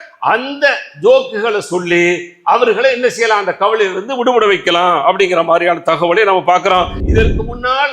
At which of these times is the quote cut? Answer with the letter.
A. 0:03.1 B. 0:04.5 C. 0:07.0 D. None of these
C